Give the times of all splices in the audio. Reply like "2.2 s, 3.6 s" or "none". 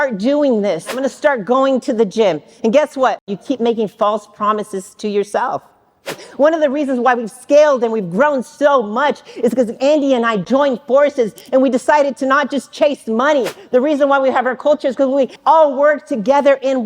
1.0 s, 3.4 s, 6.2 s, 13.6 s, 15.3 s